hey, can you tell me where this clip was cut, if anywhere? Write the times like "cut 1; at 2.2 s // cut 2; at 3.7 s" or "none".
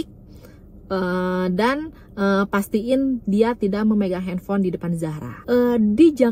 cut 1; at 5.3 s

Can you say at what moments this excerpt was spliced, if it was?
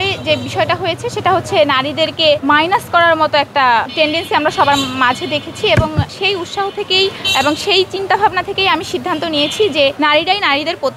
cut 1; at 2.4 s // cut 2; at 3.9 s // cut 3; at 6.1 s // cut 4; at 7.2 s // cut 5; at 10.0 s

